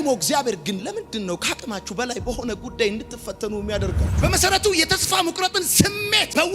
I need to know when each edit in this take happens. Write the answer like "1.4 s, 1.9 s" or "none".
4.2 s